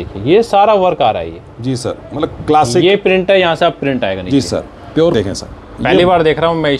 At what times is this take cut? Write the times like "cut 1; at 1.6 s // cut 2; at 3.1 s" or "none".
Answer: cut 1; at 5.1 s

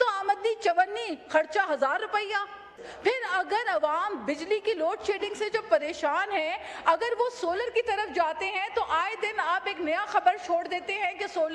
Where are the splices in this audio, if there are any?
cut 1; at 2.8 s

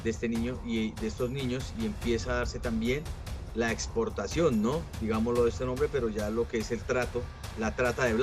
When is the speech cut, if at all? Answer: none

